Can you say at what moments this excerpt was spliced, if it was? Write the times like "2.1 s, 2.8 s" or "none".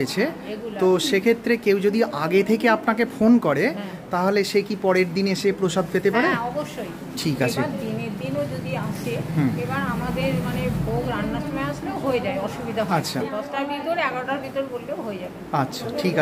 none